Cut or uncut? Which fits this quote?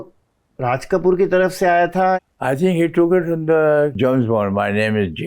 cut